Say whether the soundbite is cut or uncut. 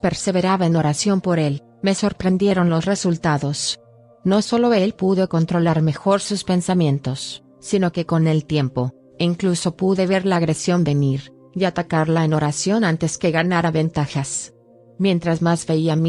uncut